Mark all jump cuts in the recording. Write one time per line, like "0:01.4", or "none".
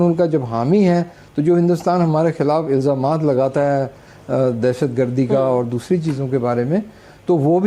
none